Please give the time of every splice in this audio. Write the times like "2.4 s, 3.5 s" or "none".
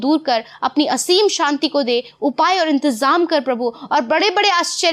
none